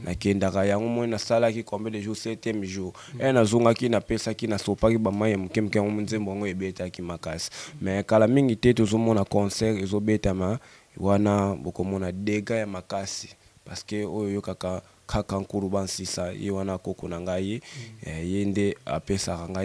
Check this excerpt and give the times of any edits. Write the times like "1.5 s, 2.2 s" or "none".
none